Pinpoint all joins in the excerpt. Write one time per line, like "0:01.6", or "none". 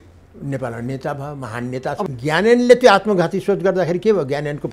0:02.1